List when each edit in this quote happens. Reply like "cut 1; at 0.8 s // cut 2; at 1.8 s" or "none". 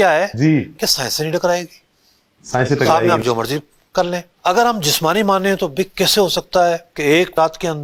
none